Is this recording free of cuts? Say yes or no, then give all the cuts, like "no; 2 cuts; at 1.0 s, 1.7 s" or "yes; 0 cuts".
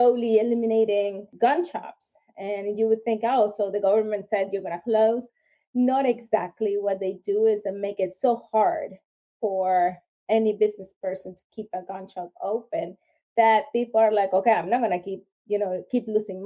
no; 1 cut; at 1.2 s